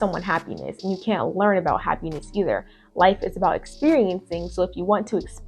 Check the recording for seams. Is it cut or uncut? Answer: uncut